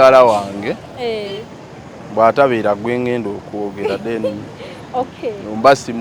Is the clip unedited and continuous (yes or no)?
yes